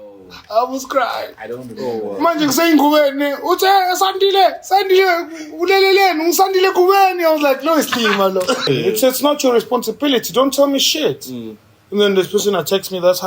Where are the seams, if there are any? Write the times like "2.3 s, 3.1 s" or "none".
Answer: 8.7 s